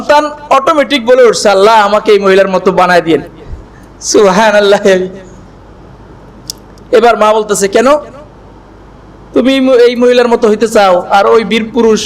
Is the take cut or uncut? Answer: uncut